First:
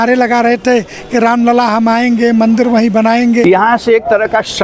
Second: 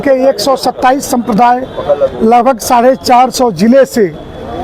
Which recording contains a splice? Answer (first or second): first